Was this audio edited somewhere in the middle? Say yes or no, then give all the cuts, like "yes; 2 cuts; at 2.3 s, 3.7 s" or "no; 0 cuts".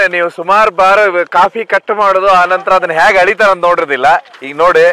no; 0 cuts